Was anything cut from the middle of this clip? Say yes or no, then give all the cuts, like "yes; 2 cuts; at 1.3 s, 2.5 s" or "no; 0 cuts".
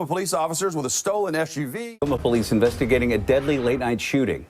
yes; 1 cut; at 1.8 s